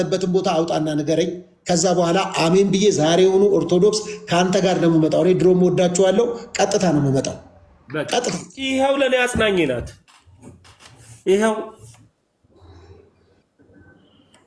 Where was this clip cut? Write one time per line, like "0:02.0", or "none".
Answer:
0:08.5